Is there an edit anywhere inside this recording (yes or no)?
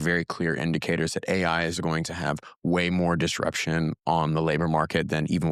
no